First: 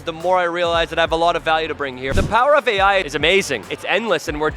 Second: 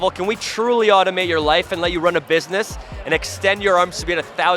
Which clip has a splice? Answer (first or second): first